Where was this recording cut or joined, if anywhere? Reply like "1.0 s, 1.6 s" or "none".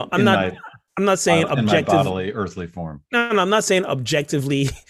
none